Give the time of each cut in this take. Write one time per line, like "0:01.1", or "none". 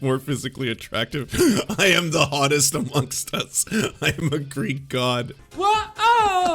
0:05.4